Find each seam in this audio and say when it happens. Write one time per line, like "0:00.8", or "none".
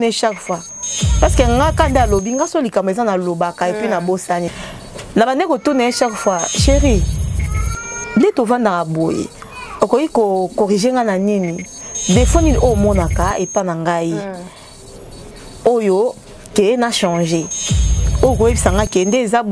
0:04.5